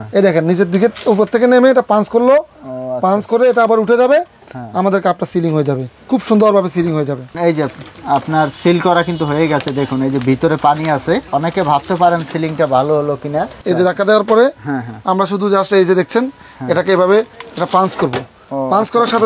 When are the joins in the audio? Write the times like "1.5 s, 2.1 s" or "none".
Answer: 7.3 s, 13.5 s